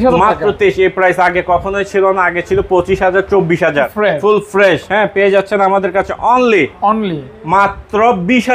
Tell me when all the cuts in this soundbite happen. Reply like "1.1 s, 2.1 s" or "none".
3.9 s